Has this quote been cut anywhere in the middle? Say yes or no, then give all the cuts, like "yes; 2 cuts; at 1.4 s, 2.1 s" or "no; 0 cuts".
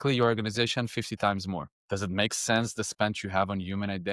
yes; 1 cut; at 1.7 s